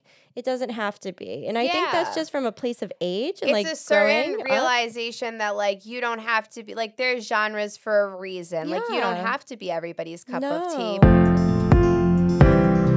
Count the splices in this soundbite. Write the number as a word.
one